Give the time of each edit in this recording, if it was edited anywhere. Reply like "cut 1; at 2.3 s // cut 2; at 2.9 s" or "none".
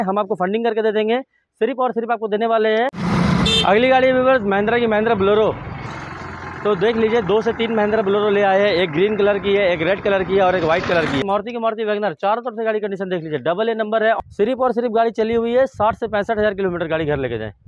cut 1; at 3.0 s // cut 2; at 5.9 s // cut 3; at 11.2 s // cut 4; at 14.2 s